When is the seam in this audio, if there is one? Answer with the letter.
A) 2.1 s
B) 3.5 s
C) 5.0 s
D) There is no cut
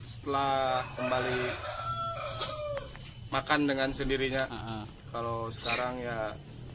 D